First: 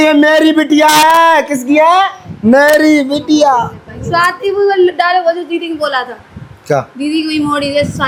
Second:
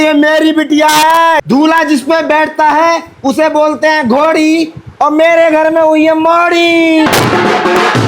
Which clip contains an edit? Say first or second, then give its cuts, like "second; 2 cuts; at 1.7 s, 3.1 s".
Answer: second; 2 cuts; at 1.4 s, 7.1 s